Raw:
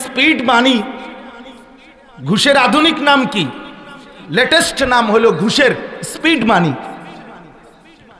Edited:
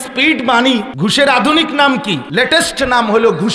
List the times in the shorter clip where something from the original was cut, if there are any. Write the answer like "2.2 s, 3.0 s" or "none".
0.9 s, 2.2 s